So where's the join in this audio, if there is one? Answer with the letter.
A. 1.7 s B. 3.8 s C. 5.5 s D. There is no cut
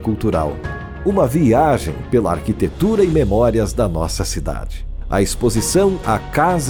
D